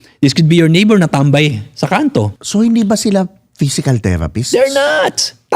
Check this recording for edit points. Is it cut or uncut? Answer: cut